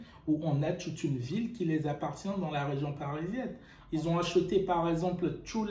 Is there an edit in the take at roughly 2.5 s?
no; 1 cut; at 3.7 s

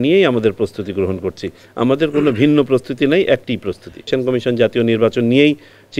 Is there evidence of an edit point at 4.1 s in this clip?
yes; 1 cut; at 4.1 s

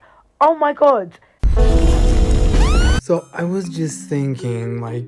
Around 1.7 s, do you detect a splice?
no; 1 cut; at 3.0 s

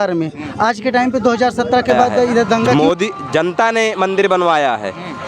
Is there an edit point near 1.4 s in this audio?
no; 1 cut; at 2.7 s

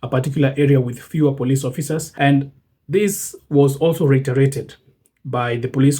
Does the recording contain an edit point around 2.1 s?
yes; 1 cut; at 2.1 s

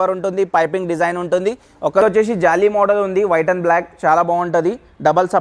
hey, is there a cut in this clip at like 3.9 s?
no; 1 cut; at 2.0 s

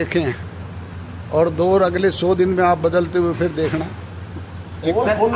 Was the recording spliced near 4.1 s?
no; 0 cuts

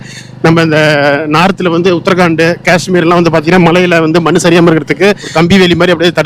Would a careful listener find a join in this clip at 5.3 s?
yes; 1 cut; at 5.3 s

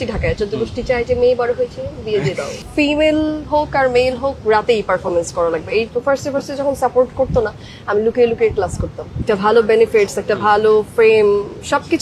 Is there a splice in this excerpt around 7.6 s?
no; 3 cuts; at 2.6 s, 5.9 s, 9.2 s

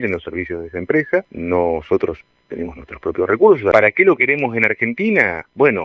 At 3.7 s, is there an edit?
yes; 2 cuts; at 1.3 s, 3.7 s

